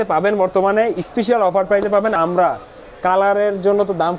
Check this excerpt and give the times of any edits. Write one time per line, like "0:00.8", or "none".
0:02.2